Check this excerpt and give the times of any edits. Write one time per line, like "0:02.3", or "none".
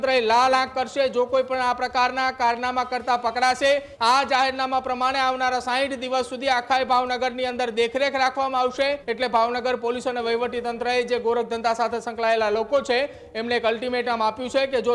0:03.9
0:09.1